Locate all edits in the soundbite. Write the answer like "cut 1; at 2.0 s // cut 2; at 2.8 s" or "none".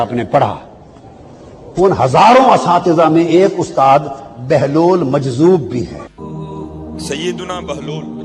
cut 1; at 6.1 s